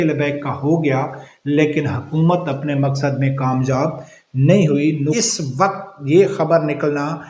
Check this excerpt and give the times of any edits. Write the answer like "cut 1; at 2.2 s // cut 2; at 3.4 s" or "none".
cut 1; at 5.2 s